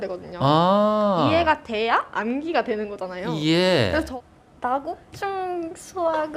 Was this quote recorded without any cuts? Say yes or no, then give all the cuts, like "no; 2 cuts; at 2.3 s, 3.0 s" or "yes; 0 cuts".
no; 1 cut; at 3.9 s